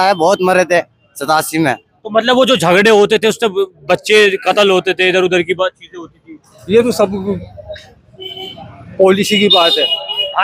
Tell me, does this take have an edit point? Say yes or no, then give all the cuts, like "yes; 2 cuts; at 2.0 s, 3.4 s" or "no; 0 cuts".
no; 0 cuts